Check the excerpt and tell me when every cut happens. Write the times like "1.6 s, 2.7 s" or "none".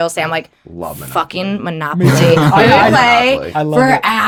none